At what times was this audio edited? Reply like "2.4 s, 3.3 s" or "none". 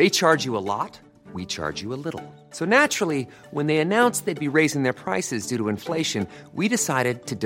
none